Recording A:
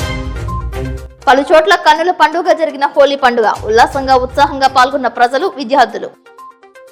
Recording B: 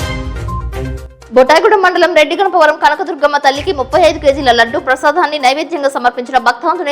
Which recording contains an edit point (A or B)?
B